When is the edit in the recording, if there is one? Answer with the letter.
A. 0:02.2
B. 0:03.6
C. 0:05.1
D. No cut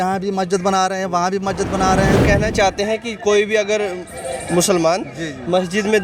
A